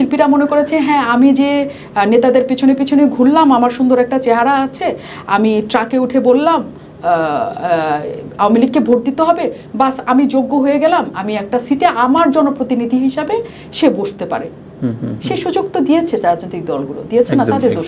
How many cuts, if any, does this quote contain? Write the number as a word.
zero